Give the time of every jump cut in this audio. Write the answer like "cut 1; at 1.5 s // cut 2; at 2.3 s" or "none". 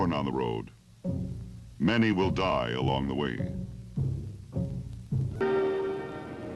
cut 1; at 2.5 s